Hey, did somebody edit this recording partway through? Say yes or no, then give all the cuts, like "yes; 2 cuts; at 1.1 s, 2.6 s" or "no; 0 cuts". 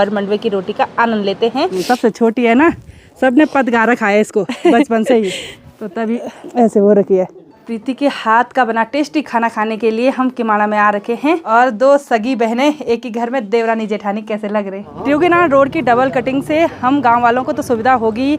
yes; 4 cuts; at 1.8 s, 7.7 s, 11.4 s, 14.9 s